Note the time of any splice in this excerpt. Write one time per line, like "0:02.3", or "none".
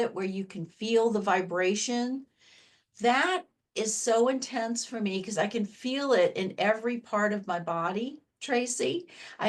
none